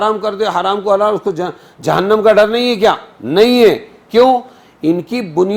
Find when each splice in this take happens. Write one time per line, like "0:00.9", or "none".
none